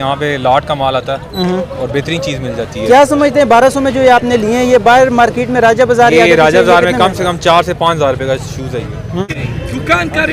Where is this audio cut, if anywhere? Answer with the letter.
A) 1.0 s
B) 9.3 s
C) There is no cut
B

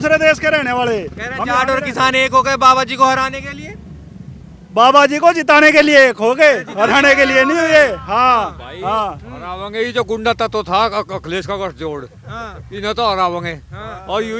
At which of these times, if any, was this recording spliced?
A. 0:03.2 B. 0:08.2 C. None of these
C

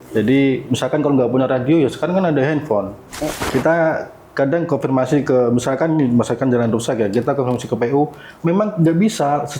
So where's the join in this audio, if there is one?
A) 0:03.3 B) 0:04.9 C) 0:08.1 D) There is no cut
A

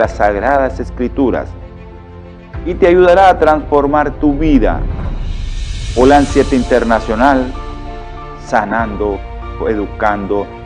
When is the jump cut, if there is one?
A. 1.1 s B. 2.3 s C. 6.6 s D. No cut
D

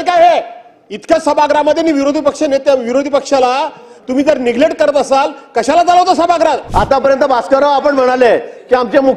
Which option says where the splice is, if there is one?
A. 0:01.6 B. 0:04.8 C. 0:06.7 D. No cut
C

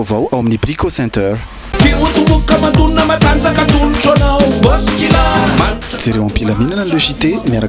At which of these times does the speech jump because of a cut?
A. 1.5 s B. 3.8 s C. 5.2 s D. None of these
D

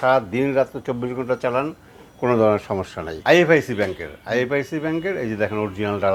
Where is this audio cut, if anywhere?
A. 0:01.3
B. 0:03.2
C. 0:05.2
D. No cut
B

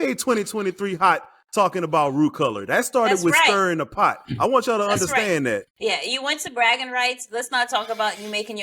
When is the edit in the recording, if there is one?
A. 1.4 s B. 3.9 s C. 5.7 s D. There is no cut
C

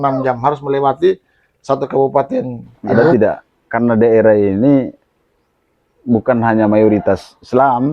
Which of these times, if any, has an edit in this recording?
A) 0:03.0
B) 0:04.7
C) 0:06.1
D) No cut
A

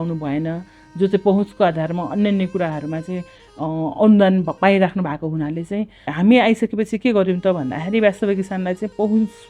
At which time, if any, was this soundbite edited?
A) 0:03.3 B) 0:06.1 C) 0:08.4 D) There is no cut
B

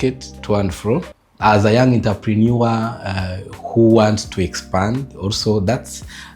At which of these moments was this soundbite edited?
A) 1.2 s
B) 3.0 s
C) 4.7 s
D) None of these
A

